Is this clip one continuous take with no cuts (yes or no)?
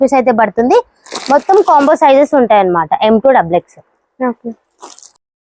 yes